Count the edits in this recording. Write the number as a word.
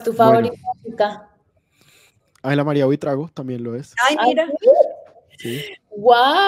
zero